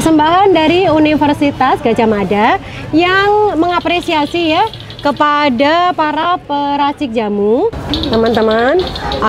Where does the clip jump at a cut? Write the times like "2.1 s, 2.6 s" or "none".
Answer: 7.9 s